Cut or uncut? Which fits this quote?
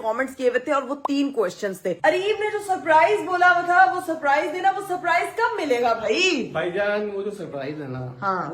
cut